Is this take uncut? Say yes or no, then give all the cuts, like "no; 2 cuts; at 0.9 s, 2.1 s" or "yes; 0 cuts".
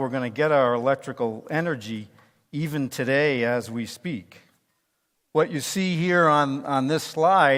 yes; 0 cuts